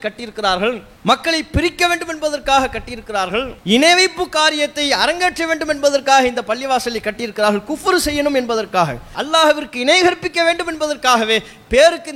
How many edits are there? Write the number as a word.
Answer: three